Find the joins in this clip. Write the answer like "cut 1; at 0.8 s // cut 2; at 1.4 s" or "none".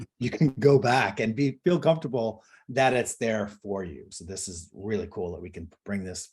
cut 1; at 4.1 s

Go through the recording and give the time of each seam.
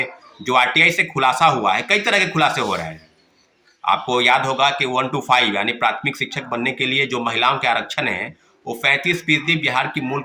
none

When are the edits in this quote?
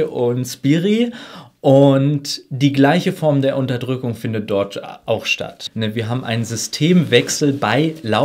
cut 1; at 5.6 s

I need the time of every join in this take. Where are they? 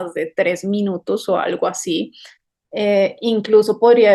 none

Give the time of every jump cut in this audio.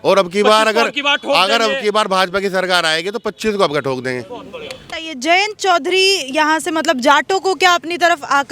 cut 1; at 4.9 s

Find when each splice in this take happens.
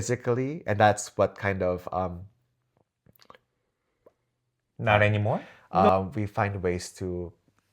cut 1; at 5.5 s

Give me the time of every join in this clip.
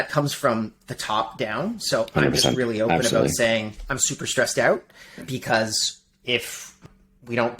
cut 1; at 5.2 s // cut 2; at 6.8 s

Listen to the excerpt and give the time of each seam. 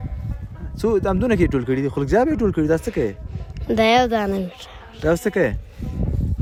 none

